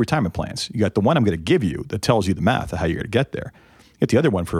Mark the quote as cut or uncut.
uncut